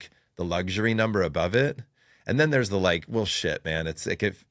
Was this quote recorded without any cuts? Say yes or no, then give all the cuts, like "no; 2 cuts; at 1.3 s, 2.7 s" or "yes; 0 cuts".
yes; 0 cuts